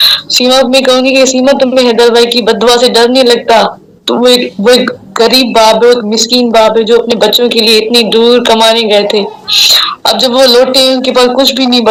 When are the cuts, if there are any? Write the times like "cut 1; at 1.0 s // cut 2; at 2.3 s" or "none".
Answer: none

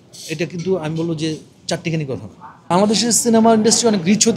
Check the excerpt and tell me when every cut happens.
cut 1; at 2.7 s

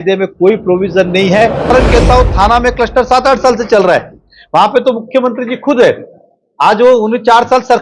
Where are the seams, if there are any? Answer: cut 1; at 1.7 s

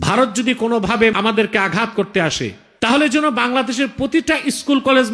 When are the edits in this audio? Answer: cut 1; at 1.1 s // cut 2; at 2.6 s

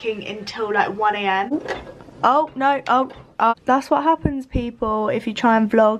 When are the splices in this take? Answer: cut 1; at 1.5 s // cut 2; at 3.5 s

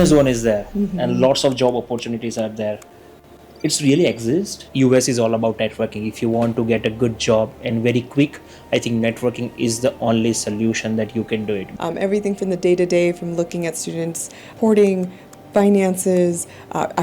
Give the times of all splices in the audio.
cut 1; at 4.6 s // cut 2; at 11.7 s // cut 3; at 14.5 s

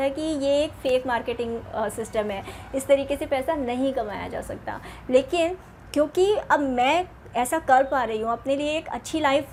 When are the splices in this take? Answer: none

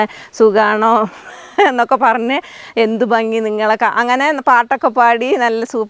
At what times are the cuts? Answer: none

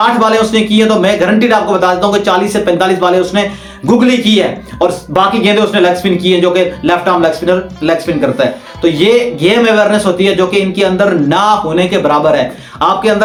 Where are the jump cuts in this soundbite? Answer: none

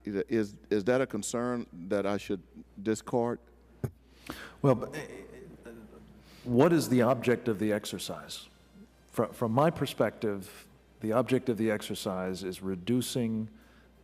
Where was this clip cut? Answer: cut 1; at 7.2 s

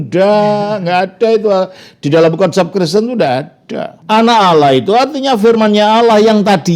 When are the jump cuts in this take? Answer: cut 1; at 3.9 s

